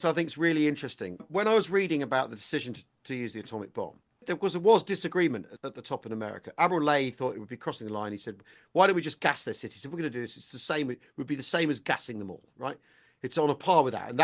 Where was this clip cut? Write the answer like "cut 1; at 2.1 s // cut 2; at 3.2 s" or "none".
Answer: cut 1; at 1.2 s // cut 2; at 4.2 s // cut 3; at 5.6 s